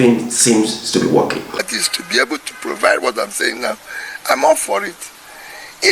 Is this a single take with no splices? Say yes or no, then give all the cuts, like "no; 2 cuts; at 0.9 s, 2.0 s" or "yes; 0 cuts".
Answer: no; 1 cut; at 1.7 s